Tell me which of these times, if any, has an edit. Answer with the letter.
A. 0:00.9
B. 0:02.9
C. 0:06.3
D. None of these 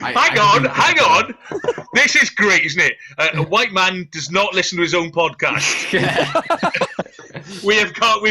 D